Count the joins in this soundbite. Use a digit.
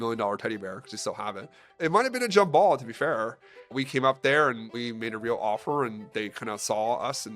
3